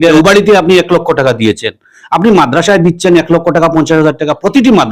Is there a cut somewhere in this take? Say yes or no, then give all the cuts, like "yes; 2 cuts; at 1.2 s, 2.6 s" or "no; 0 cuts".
no; 0 cuts